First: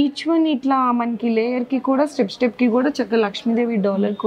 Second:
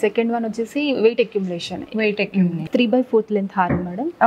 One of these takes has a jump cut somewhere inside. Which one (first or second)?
second